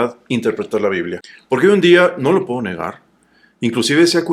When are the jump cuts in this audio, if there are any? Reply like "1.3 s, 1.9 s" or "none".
1.2 s